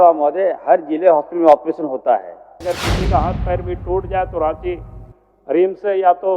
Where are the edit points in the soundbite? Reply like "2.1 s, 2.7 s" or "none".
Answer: 2.6 s

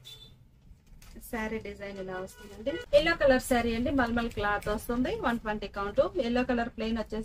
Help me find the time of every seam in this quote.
2.8 s

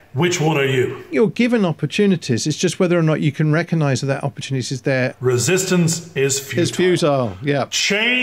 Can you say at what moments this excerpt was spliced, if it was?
1.1 s, 4.8 s

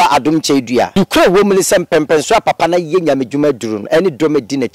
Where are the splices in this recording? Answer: 0.9 s

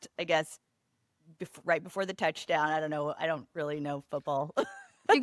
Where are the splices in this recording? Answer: none

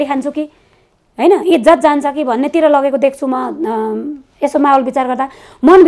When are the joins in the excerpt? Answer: none

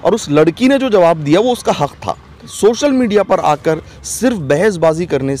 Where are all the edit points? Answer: 2.5 s

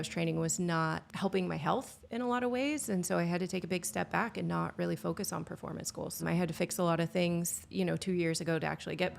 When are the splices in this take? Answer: 1.1 s, 6.2 s, 7.6 s

